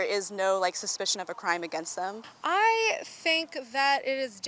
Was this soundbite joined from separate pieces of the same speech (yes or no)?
yes